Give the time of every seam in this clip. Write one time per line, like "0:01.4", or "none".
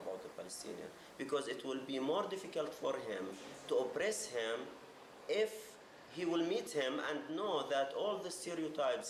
none